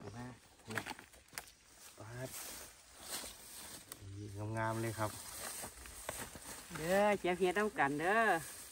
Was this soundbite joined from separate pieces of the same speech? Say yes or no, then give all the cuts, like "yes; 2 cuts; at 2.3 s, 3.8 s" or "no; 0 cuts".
no; 0 cuts